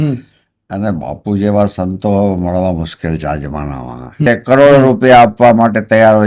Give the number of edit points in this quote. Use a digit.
1